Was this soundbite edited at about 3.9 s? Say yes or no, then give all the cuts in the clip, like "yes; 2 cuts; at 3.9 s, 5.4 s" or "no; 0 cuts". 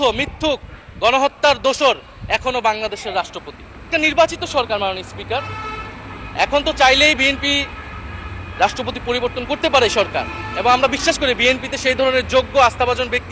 yes; 1 cut; at 3.9 s